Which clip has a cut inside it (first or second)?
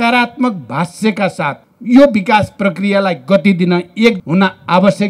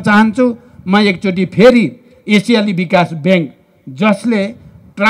first